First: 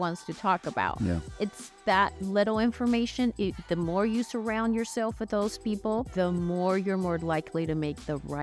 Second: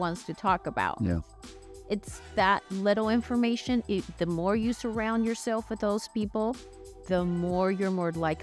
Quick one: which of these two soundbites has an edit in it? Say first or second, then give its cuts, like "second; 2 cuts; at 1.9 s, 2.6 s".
first; 2 cuts; at 1.3 s, 6.1 s